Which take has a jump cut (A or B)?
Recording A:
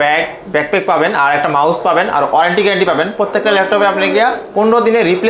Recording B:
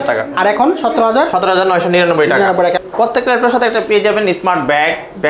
B